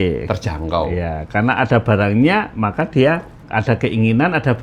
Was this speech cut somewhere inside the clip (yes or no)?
yes